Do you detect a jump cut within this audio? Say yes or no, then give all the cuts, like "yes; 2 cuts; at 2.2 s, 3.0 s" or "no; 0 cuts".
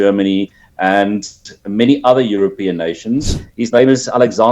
yes; 1 cut; at 3.3 s